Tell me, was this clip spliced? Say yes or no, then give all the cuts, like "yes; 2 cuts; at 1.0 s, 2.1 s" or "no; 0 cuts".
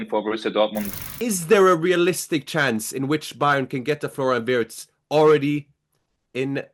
yes; 1 cut; at 0.9 s